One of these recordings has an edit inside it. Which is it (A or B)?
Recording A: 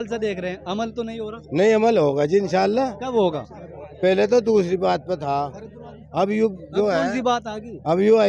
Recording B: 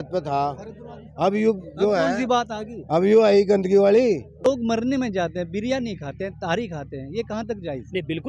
B